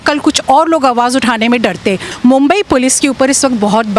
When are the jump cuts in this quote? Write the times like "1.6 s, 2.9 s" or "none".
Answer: 2.1 s